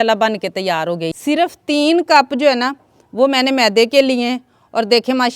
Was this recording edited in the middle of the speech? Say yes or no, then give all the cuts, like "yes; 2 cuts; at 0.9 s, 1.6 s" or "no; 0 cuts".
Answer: yes; 1 cut; at 1.1 s